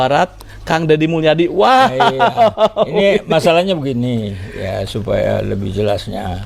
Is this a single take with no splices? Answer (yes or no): yes